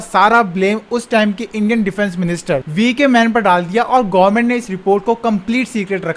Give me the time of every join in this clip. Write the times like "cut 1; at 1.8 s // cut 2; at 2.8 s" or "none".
none